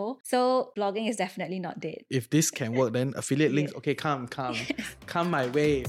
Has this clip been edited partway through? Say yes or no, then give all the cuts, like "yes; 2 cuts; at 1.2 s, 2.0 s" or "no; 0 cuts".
yes; 1 cut; at 2.0 s